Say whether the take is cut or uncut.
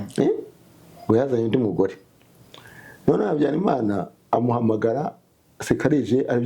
uncut